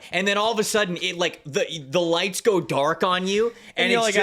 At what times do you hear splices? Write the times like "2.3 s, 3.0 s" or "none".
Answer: none

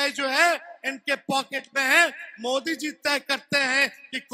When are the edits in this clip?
none

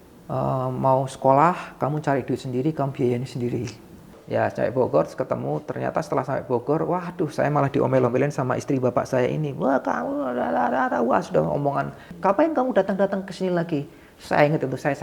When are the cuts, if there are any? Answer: 4.1 s, 12.1 s

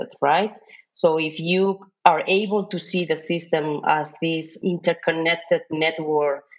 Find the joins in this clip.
4.6 s

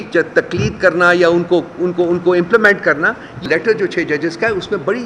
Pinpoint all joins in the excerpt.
3.5 s

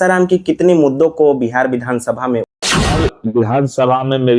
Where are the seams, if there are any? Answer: 2.6 s

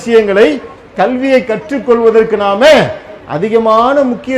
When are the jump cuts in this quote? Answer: none

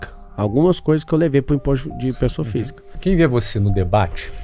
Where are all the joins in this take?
3.0 s

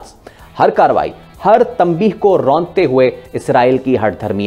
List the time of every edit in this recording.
none

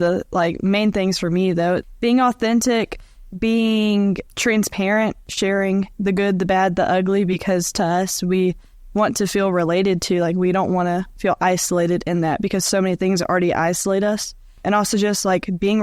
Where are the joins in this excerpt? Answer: 1.9 s, 4.2 s, 5.3 s, 14.6 s

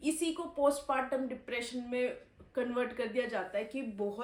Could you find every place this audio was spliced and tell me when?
none

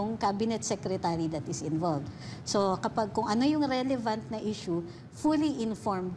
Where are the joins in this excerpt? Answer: none

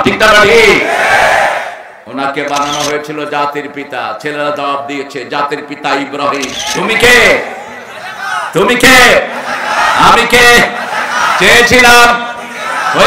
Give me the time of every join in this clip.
6.5 s

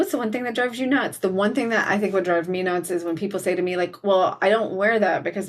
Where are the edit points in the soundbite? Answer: none

